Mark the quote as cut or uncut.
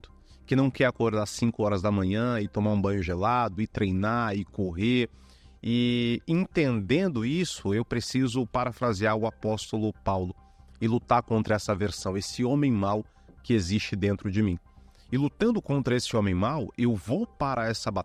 uncut